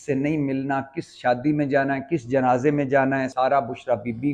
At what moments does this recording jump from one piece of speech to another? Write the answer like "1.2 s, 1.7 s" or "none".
3.3 s